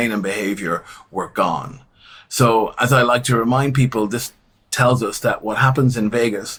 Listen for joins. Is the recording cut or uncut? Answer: uncut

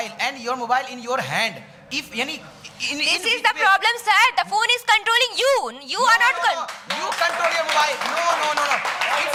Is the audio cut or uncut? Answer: uncut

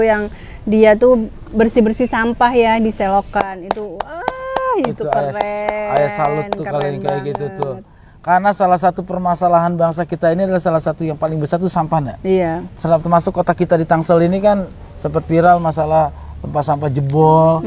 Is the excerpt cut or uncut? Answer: uncut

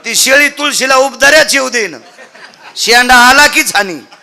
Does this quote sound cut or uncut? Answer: uncut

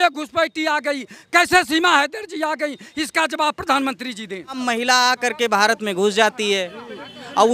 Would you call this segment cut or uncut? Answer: cut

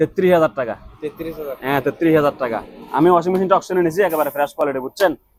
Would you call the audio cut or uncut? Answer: uncut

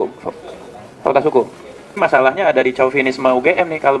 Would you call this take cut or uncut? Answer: cut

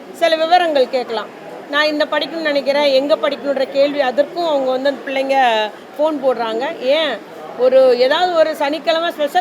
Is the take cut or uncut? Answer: uncut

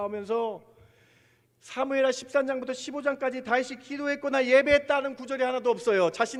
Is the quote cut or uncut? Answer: uncut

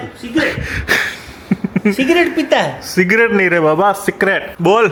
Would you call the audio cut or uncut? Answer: uncut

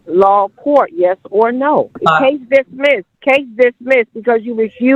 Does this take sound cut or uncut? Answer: cut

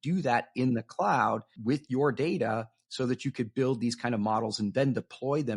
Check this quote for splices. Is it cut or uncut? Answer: cut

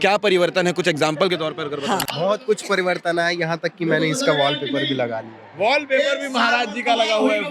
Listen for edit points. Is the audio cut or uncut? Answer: cut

